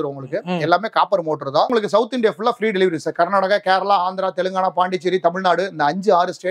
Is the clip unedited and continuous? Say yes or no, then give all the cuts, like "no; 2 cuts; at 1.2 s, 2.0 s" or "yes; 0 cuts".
no; 1 cut; at 1.7 s